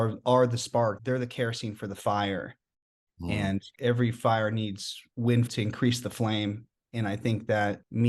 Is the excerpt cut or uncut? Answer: cut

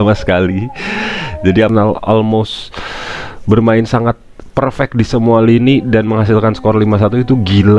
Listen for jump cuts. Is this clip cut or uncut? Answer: cut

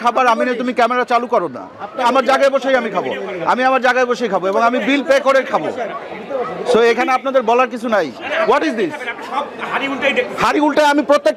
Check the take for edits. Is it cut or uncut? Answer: cut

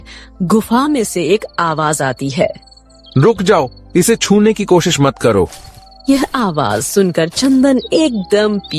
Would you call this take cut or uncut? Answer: uncut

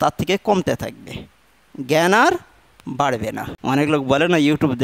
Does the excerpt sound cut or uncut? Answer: cut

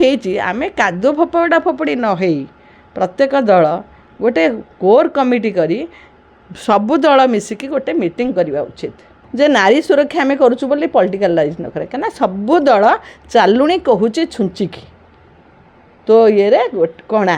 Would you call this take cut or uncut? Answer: cut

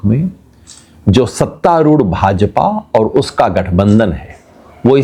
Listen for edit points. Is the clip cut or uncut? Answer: uncut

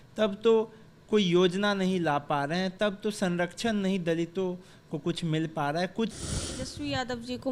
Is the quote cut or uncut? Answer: cut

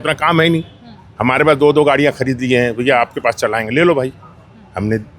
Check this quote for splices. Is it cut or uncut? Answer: uncut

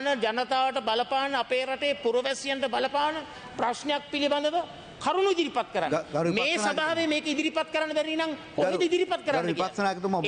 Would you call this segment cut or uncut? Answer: uncut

